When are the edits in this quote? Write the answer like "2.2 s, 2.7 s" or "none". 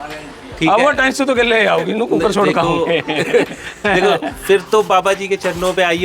none